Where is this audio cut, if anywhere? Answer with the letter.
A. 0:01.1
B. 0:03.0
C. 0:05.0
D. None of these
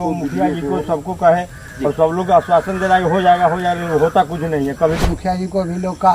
C